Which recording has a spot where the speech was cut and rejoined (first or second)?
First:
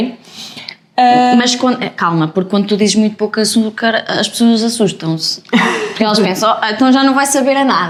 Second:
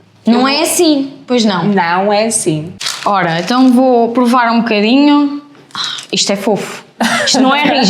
second